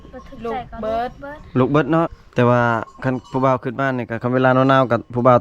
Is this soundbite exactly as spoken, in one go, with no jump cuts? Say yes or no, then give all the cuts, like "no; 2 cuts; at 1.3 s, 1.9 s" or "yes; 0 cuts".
no; 1 cut; at 2.2 s